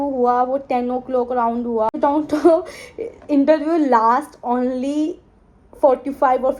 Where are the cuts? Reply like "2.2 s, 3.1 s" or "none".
1.9 s